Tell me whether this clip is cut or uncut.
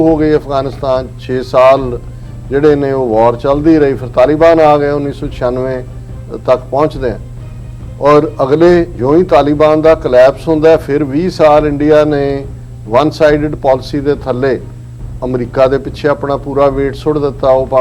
uncut